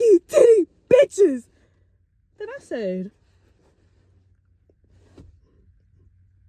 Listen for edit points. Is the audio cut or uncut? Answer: uncut